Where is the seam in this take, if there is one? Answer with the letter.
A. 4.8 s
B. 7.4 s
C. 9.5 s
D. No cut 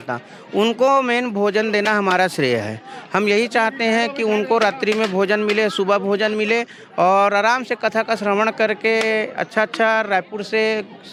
D